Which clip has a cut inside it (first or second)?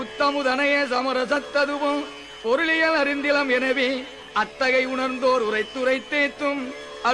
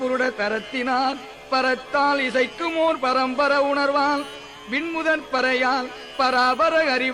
second